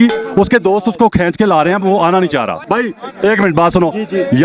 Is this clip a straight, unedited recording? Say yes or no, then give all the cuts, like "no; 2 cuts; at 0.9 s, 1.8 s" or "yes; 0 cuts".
no; 1 cut; at 2.6 s